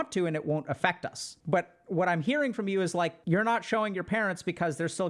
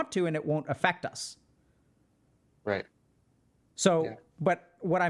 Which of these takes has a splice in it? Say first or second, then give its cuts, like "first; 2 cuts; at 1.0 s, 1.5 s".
first; 2 cuts; at 1.3 s, 3.2 s